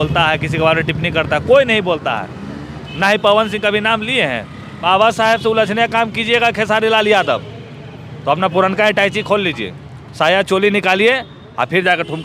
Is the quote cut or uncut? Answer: cut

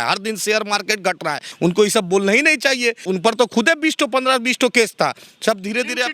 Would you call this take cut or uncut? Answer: cut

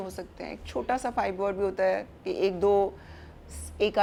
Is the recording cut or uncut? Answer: uncut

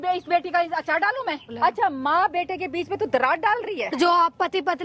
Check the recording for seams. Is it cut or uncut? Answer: cut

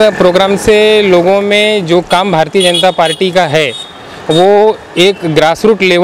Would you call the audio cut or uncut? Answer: uncut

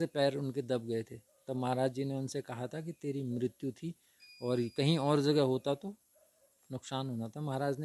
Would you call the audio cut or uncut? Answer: uncut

